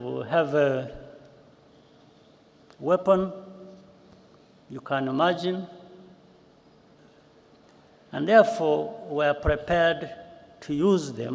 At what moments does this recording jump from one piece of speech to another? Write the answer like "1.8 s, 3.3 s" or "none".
none